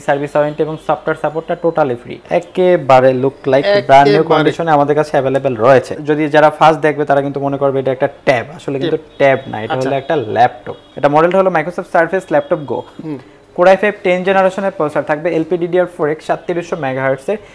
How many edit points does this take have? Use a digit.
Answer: 3